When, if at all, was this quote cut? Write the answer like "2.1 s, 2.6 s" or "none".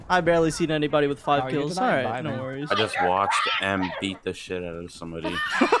none